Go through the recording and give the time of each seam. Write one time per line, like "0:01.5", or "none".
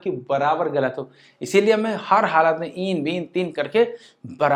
none